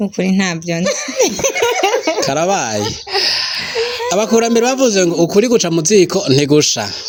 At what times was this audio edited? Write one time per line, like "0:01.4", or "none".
none